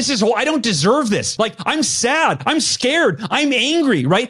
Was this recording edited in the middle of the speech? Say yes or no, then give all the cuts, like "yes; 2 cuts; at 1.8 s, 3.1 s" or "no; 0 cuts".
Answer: yes; 1 cut; at 1.3 s